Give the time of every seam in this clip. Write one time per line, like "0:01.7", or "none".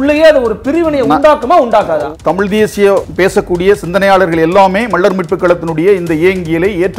0:02.1
0:03.1